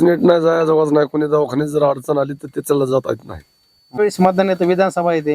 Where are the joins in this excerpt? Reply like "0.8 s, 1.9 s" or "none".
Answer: 4.0 s